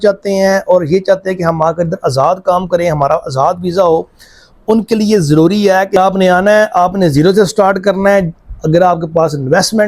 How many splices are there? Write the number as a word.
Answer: one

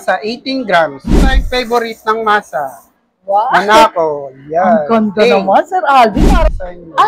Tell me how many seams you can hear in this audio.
two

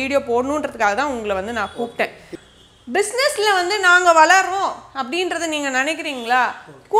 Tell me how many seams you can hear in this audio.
one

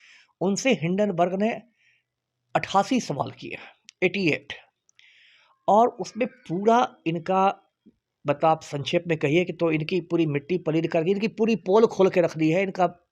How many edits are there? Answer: zero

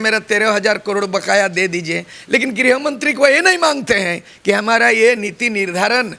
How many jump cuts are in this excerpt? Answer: zero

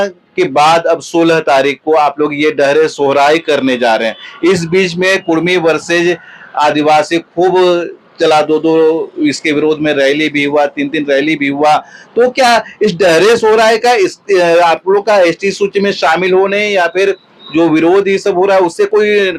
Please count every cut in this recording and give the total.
zero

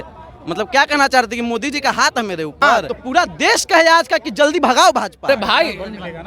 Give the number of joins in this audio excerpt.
two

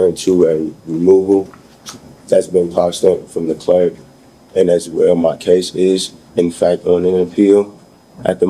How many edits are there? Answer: zero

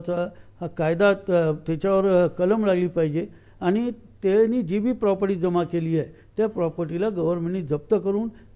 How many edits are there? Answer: zero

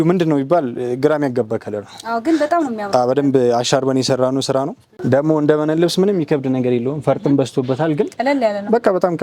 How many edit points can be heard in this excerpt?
one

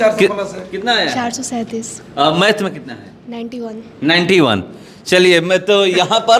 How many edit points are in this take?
zero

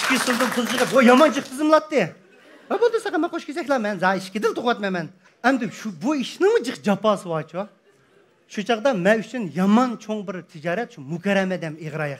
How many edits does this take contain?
one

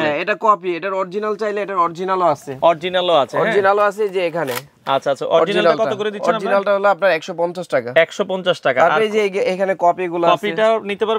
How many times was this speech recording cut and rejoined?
zero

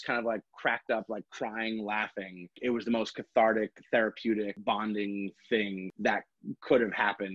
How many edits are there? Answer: three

